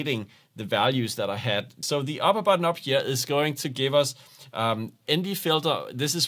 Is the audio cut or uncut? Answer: cut